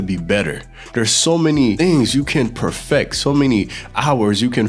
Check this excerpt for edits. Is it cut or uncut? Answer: cut